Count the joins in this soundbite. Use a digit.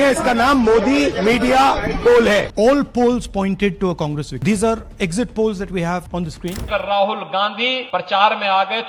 4